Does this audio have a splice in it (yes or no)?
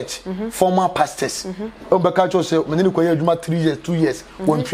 no